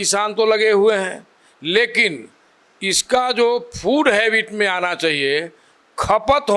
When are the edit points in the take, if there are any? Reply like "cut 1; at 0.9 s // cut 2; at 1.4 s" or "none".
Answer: none